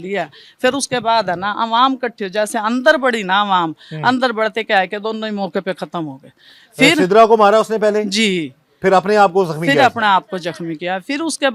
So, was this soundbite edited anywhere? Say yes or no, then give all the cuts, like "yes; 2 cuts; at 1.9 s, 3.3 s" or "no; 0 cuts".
no; 0 cuts